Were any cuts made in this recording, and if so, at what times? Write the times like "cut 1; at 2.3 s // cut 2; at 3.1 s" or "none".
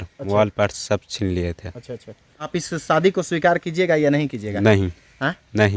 cut 1; at 2.5 s